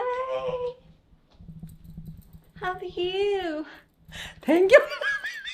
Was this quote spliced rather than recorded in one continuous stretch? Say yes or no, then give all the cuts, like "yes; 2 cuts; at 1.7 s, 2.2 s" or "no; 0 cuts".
no; 0 cuts